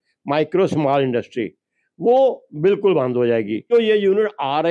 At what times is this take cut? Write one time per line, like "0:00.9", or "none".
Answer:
0:03.7